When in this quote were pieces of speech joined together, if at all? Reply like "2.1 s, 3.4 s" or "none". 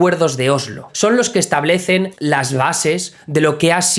0.9 s, 2.1 s